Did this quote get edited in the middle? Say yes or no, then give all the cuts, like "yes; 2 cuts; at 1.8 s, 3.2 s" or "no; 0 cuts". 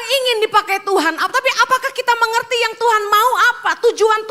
no; 0 cuts